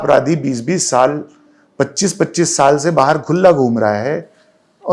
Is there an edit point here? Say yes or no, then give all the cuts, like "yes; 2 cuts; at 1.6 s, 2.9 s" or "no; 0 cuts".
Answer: no; 0 cuts